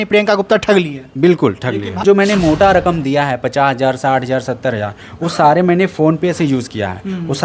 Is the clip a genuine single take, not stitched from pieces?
no; 1 cut; at 2.0 s

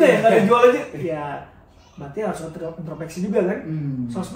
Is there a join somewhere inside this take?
no; 0 cuts

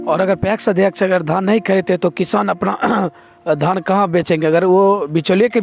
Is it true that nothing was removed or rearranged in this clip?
yes; 0 cuts

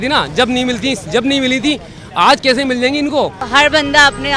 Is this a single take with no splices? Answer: no; 1 cut; at 3.4 s

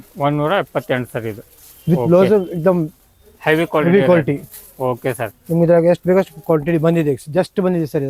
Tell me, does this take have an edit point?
no; 0 cuts

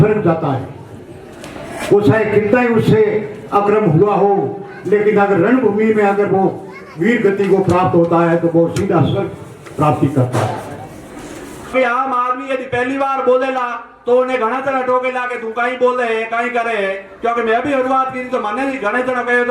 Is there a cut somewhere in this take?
yes; 1 cut; at 11.7 s

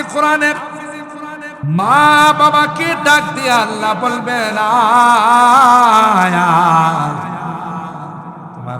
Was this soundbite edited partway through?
yes; 1 cut; at 1.5 s

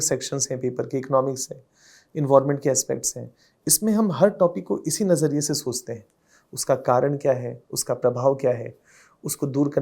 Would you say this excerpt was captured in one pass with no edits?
yes; 0 cuts

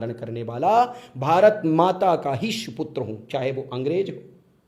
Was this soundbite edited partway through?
no; 0 cuts

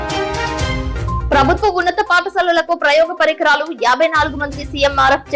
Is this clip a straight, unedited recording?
yes; 0 cuts

